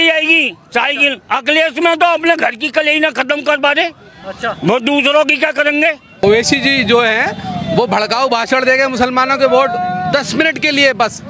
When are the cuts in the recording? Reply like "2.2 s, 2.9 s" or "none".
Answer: 6.2 s